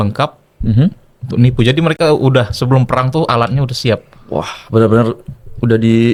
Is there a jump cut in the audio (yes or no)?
no